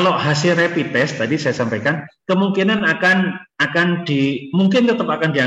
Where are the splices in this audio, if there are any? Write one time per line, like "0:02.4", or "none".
none